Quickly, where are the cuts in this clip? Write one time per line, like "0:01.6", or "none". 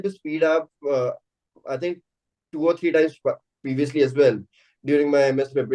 none